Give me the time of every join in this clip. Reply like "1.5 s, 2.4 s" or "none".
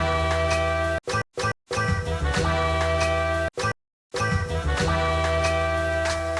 none